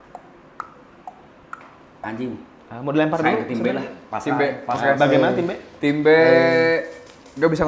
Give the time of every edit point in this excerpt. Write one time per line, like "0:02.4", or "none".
none